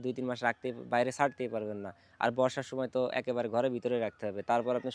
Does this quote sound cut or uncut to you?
uncut